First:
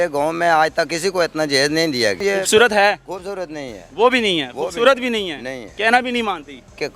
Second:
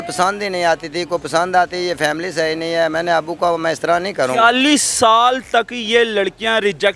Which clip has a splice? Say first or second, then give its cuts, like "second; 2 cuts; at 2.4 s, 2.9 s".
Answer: first; 1 cut; at 2.2 s